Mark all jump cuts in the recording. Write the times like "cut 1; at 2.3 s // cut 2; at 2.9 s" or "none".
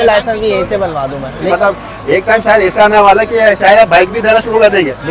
cut 1; at 1.4 s